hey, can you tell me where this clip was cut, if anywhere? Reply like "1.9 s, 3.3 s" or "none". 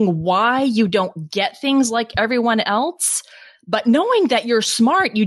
none